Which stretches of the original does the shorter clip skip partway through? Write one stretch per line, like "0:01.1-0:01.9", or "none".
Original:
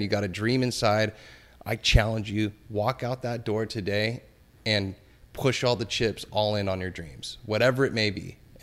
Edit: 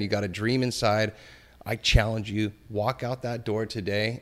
none